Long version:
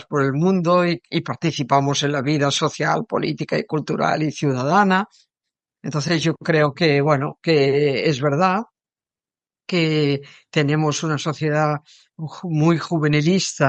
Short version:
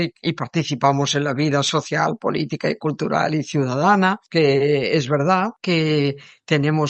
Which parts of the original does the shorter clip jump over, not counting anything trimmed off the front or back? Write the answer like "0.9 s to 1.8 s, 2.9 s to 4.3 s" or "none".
5.1 s to 7.4 s, 8.7 s to 9.6 s